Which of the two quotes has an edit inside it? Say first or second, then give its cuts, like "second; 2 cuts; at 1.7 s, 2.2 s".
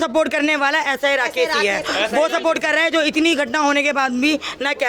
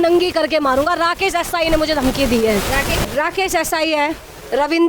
second; 1 cut; at 3.0 s